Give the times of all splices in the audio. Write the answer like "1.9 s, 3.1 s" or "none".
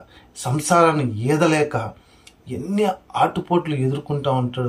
none